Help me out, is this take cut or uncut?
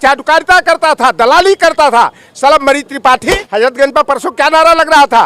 cut